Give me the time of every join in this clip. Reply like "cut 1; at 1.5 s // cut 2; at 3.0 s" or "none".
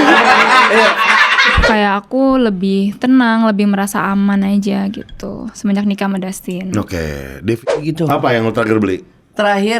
cut 1; at 1.6 s // cut 2; at 7.6 s